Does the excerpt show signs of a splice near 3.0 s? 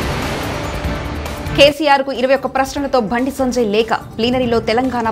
no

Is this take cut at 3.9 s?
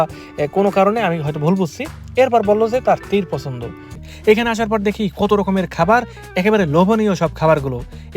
yes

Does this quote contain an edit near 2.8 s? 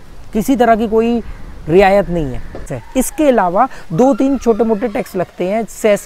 yes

